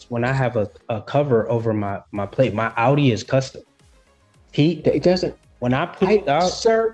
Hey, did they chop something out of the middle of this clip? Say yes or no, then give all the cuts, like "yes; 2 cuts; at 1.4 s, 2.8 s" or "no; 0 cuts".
no; 0 cuts